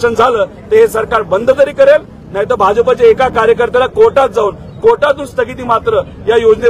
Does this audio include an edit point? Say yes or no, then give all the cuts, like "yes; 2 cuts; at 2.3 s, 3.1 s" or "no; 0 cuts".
no; 0 cuts